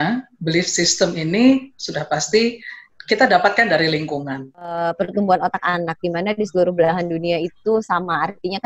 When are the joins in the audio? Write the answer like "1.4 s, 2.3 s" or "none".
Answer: 4.8 s